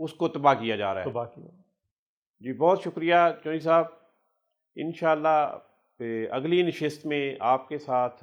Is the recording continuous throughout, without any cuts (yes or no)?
yes